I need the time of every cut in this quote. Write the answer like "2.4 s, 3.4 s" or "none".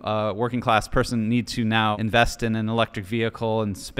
2.0 s

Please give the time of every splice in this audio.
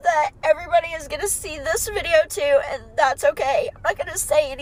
none

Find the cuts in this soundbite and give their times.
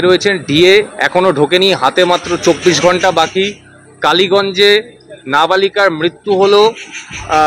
none

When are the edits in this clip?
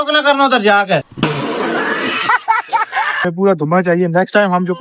3.2 s

